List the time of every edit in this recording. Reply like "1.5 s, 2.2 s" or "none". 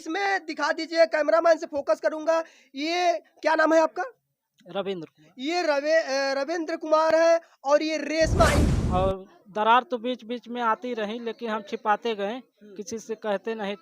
8.6 s